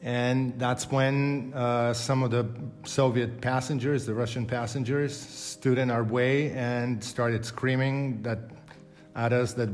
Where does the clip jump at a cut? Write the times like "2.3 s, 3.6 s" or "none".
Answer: none